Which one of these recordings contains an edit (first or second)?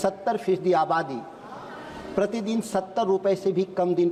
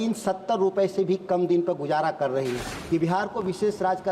second